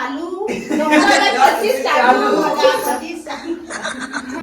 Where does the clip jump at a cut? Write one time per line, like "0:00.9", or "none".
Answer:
0:01.3